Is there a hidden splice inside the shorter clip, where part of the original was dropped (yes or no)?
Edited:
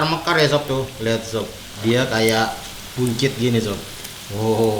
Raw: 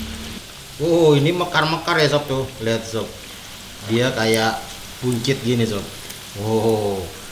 yes